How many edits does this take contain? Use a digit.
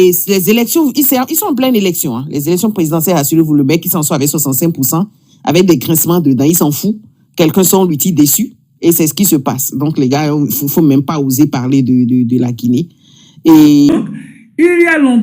1